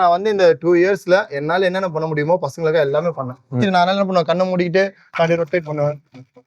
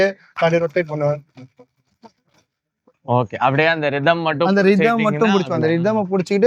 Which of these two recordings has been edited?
first; 1 cut; at 3.6 s

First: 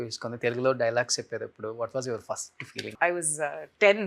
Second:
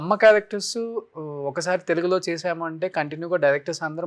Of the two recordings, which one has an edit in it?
first; 1 cut; at 2.9 s

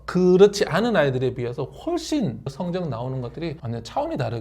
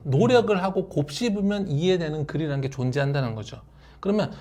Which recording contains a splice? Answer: first; 1 cut; at 2.5 s

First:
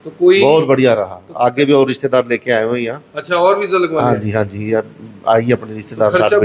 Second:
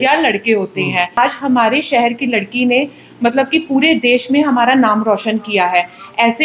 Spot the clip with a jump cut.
second; 1 cut; at 1.2 s

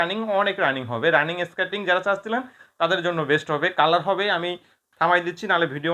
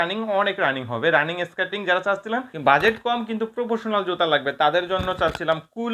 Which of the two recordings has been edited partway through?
second; 1 cut; at 2.5 s

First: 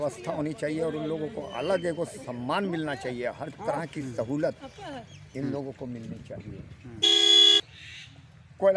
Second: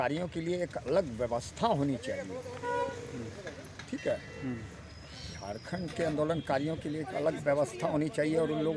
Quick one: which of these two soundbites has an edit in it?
first; 1 cut; at 7.6 s

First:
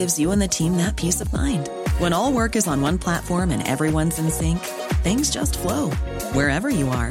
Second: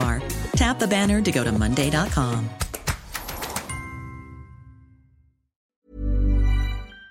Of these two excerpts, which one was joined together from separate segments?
second; 1 cut; at 5.8 s

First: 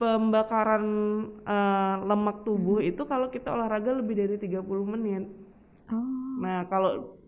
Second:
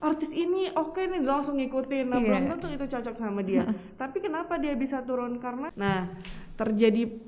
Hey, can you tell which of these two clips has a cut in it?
second; 1 cut; at 5.7 s

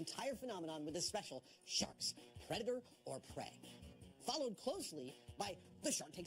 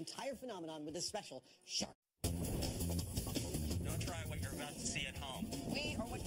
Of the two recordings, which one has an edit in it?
first; 1 cut; at 2.1 s

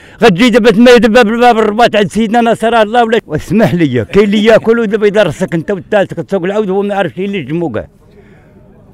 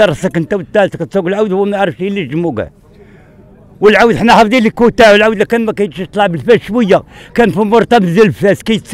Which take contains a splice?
first; 1 cut; at 3.2 s

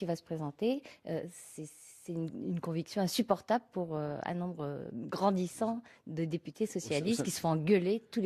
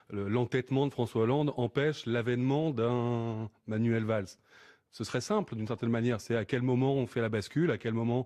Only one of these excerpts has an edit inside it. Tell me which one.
second; 1 cut; at 3.1 s

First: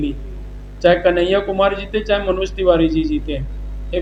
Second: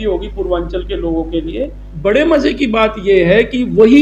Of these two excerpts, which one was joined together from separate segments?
second; 1 cut; at 1.8 s

